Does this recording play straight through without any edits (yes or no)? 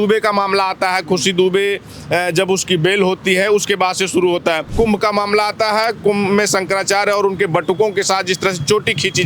no